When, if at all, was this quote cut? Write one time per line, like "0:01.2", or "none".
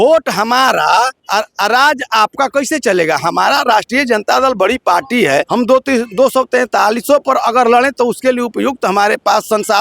0:01.2
0:05.5